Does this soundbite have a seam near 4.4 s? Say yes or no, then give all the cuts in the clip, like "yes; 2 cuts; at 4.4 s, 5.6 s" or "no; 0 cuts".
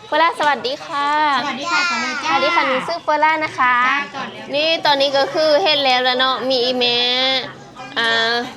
yes; 1 cut; at 4.4 s